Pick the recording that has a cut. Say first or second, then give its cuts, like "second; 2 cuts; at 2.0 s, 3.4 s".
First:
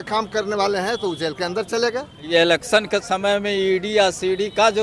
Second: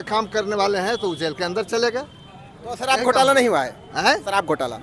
first; 1 cut; at 2.3 s